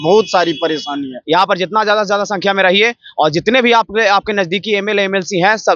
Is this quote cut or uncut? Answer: cut